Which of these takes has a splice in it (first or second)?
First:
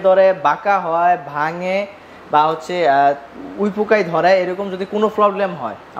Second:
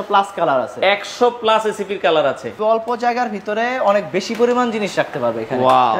second